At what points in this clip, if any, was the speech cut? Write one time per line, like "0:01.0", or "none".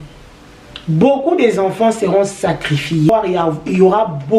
0:03.1